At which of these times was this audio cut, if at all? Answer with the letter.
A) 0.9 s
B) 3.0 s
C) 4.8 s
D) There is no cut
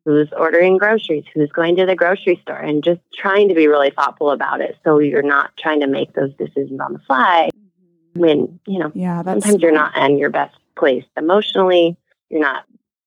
B